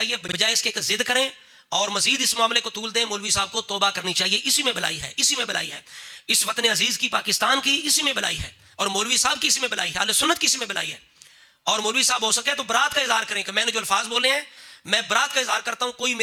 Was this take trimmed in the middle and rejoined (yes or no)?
no